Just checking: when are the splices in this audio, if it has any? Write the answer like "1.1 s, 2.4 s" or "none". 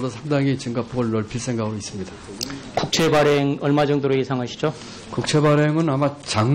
none